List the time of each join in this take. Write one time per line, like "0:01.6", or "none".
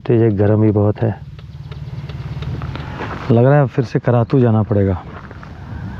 0:02.7